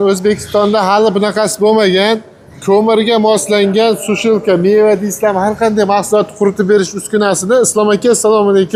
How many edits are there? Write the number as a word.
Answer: zero